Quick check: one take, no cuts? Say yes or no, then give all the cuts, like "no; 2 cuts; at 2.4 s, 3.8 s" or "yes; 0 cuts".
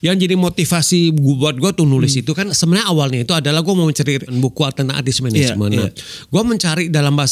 no; 2 cuts; at 2.5 s, 4.3 s